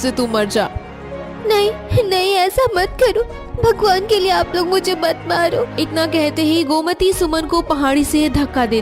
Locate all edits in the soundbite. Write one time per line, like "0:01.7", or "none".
0:05.7